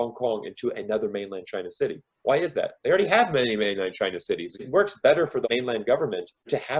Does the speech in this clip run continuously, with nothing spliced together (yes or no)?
yes